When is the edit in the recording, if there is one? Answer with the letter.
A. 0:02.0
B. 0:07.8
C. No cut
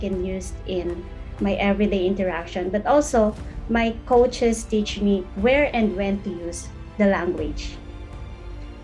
C